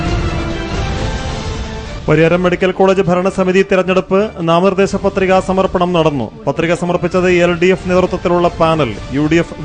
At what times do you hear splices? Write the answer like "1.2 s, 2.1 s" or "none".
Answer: none